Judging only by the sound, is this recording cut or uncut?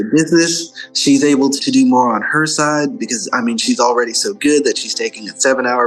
cut